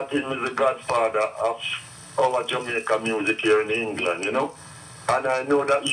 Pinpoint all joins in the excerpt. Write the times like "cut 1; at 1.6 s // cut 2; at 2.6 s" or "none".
none

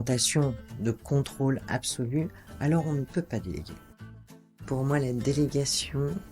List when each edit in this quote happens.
cut 1; at 4.4 s

